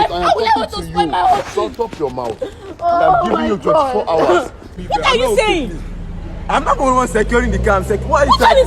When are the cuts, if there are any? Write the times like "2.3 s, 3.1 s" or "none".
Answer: 4.7 s